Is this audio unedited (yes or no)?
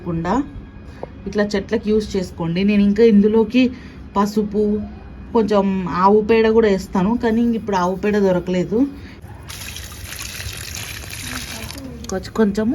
no